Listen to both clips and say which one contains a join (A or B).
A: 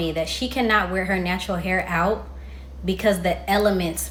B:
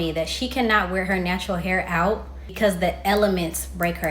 B